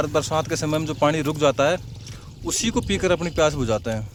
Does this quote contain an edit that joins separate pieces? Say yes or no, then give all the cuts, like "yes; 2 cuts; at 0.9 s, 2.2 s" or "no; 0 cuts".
no; 0 cuts